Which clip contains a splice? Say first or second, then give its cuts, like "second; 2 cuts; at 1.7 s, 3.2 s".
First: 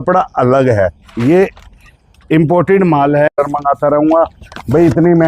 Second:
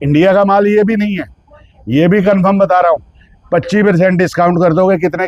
first; 1 cut; at 3.3 s